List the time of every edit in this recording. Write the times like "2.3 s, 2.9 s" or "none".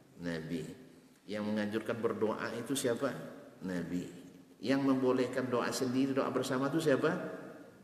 1.2 s